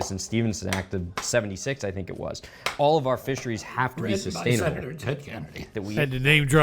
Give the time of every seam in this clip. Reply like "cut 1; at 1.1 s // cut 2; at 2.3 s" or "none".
cut 1; at 5.7 s